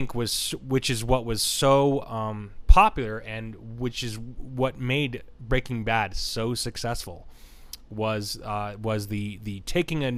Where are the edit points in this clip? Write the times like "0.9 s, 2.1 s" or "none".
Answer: none